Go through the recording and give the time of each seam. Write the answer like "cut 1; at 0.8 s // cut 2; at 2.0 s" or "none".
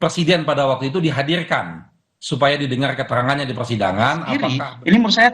cut 1; at 4.5 s

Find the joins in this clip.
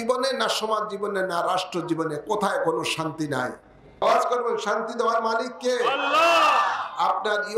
cut 1; at 4.0 s

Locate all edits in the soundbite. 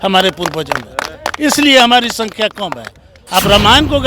cut 1; at 3.1 s

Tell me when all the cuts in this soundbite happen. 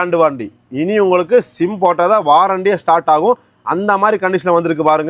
none

